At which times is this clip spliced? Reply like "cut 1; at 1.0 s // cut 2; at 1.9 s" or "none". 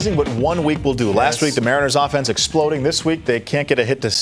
none